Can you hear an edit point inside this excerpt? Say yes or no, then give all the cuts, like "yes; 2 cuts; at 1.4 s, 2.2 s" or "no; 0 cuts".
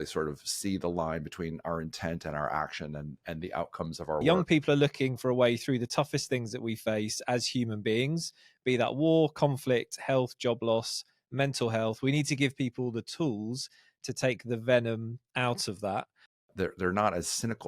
yes; 2 cuts; at 4.2 s, 16.5 s